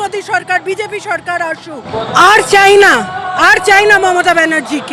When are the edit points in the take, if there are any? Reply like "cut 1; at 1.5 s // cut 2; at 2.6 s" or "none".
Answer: cut 1; at 2.1 s